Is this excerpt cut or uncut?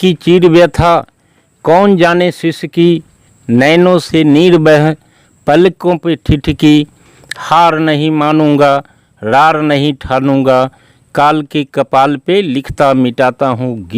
uncut